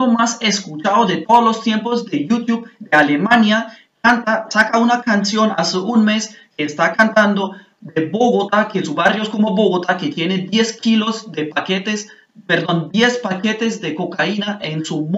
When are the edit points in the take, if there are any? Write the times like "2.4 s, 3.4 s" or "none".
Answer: none